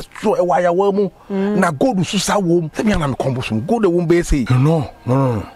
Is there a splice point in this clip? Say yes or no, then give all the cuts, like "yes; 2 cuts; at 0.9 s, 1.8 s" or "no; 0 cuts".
yes; 2 cuts; at 2.7 s, 4.5 s